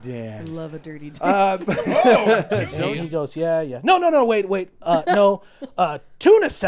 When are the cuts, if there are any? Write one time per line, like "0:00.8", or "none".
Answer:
0:02.7